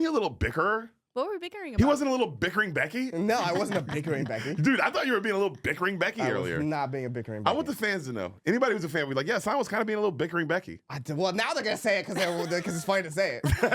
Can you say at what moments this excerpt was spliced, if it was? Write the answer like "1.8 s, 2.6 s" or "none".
1.0 s